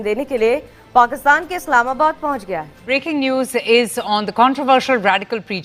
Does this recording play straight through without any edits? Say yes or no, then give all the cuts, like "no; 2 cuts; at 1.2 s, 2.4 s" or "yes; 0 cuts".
no; 1 cut; at 2.7 s